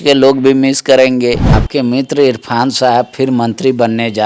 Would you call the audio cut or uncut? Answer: cut